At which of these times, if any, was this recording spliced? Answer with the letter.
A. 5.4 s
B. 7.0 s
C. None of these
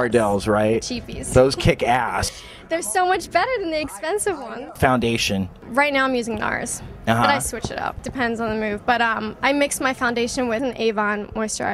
C